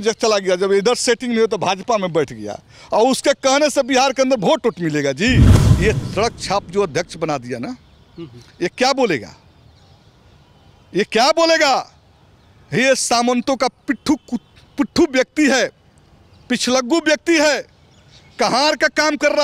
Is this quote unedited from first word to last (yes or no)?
no